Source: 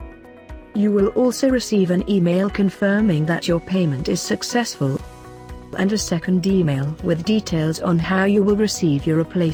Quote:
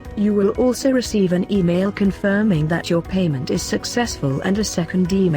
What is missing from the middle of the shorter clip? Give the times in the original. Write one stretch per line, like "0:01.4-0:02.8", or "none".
0:05.0-0:05.7